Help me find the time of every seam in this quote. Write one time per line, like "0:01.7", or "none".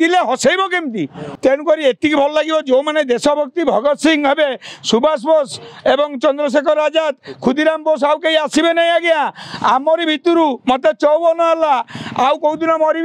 0:01.2